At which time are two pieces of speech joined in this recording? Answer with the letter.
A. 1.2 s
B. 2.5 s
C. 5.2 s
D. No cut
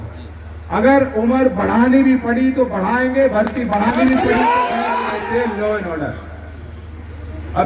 C